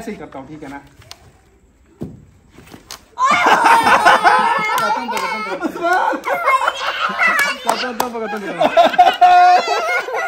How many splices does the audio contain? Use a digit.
0